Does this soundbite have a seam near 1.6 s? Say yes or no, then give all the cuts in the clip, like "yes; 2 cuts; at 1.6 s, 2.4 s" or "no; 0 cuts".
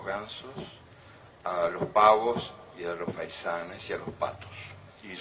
no; 1 cut; at 3.5 s